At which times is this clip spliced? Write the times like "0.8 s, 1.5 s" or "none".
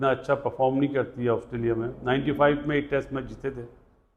none